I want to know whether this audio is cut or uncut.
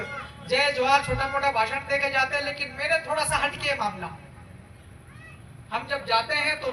uncut